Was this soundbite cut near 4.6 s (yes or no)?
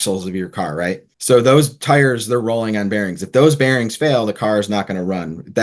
no